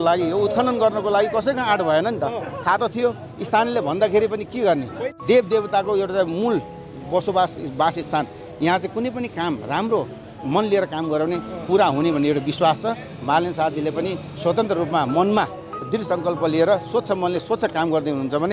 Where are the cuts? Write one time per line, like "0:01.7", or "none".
0:05.0